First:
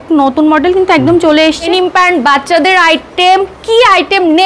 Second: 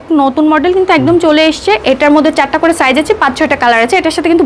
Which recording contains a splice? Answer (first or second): first